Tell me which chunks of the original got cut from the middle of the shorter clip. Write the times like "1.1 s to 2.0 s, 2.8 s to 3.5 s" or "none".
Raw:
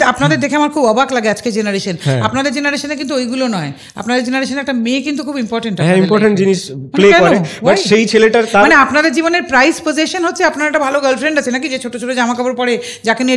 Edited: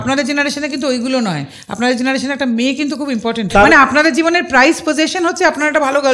5.8 s to 8.5 s